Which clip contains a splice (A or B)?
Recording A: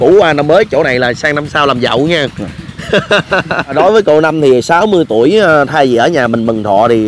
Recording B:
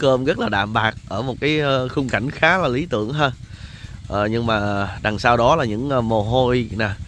A